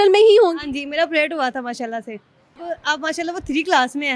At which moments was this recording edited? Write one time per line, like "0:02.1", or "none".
0:02.6

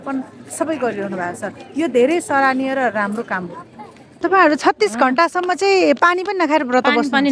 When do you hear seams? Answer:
0:04.2

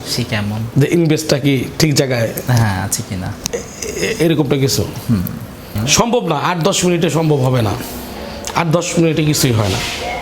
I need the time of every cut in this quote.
0:05.8

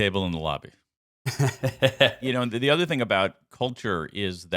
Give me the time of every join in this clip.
0:02.2

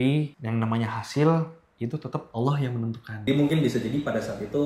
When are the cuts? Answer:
0:03.2

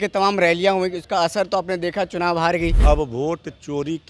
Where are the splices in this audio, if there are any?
0:02.8

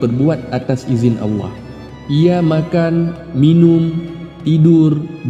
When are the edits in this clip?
none

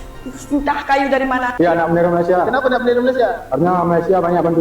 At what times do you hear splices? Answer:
0:01.5

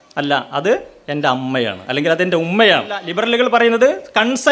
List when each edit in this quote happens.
0:03.1

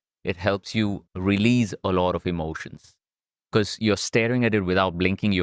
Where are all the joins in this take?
0:01.0

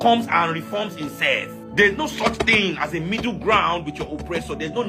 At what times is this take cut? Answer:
0:01.6

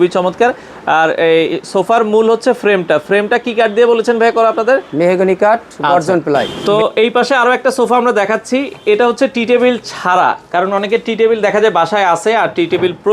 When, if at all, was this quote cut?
0:06.5

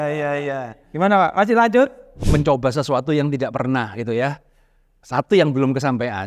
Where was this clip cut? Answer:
0:02.1

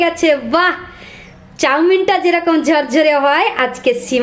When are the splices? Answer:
none

